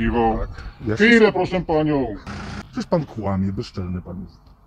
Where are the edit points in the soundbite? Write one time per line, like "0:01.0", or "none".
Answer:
0:02.2